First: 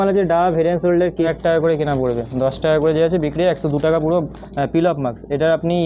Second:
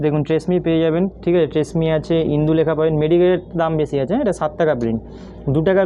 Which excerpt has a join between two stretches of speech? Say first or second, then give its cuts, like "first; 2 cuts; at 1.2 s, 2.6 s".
first; 2 cuts; at 1.3 s, 4.3 s